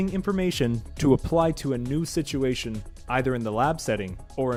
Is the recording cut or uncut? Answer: uncut